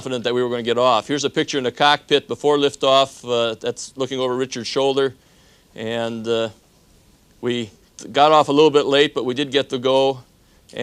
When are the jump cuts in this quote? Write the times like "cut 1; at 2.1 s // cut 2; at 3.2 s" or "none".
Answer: cut 1; at 4.0 s